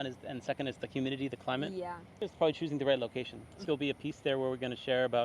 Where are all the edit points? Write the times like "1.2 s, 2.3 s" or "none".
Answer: 2.0 s, 3.6 s